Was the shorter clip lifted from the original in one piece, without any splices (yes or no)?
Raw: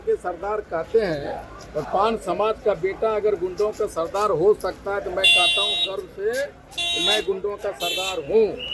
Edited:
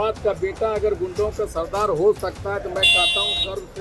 yes